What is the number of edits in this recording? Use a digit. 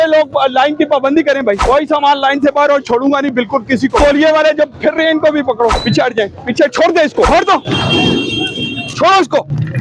4